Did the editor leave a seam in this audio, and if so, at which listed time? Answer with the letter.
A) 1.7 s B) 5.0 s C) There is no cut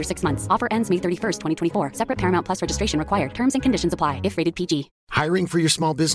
B